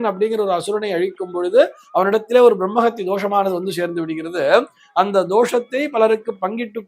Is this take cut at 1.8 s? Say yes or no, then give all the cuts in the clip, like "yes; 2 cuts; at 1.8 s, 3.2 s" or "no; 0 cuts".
no; 0 cuts